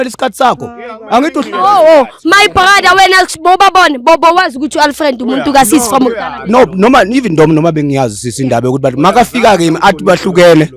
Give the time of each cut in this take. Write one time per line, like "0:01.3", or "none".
none